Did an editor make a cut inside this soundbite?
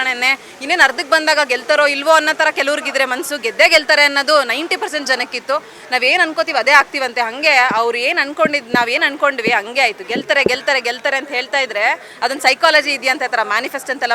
no; 0 cuts

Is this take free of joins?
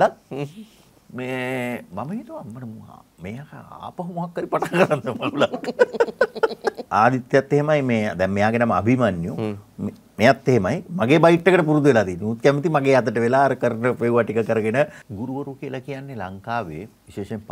no; 2 cuts; at 6.8 s, 15.0 s

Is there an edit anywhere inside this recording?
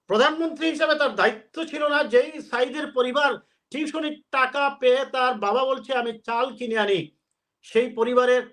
no; 0 cuts

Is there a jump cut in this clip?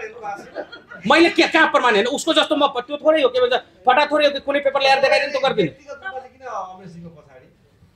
no; 0 cuts

